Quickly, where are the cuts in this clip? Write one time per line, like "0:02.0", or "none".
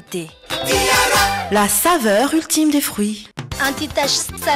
0:03.2

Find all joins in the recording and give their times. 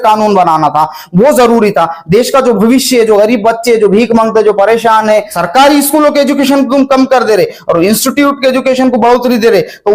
0:05.4

